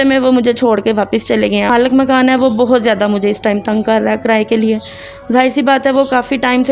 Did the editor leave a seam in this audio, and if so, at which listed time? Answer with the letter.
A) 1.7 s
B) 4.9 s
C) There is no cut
A